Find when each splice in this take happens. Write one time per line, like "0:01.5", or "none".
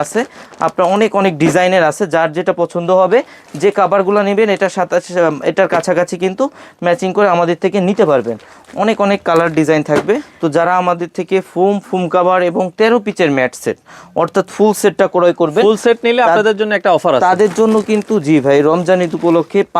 0:10.3